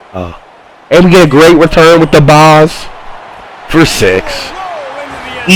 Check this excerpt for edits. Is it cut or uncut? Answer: uncut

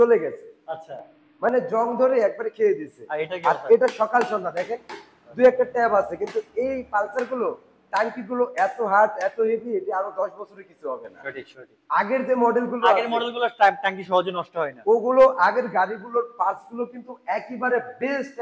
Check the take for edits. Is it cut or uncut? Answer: uncut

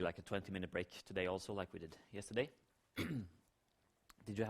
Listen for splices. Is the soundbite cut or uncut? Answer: cut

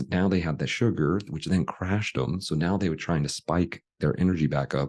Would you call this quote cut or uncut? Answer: uncut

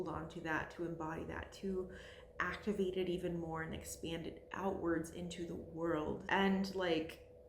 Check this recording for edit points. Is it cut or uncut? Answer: cut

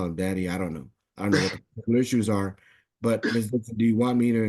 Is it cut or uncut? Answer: uncut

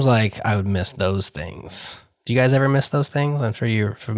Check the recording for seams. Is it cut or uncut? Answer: uncut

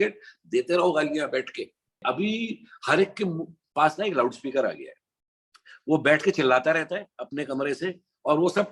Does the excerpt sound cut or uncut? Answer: cut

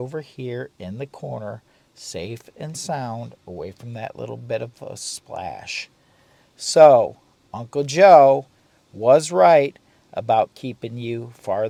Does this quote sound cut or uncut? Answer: uncut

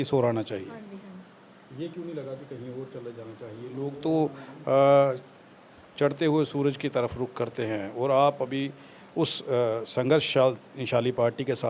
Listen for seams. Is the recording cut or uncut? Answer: uncut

